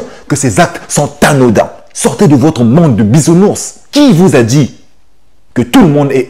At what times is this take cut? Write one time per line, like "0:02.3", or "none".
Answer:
0:01.8
0:03.7